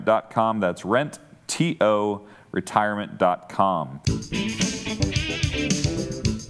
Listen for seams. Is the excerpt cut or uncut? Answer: cut